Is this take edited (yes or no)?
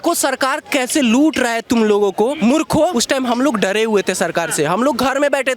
yes